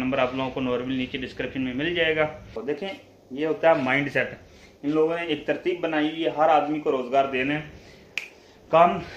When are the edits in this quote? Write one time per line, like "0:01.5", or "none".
0:02.5